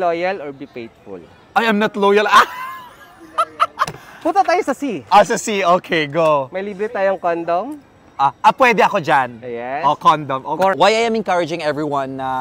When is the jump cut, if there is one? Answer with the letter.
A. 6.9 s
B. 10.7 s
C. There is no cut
B